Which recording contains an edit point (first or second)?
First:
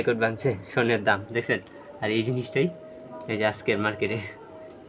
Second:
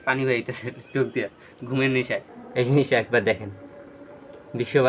second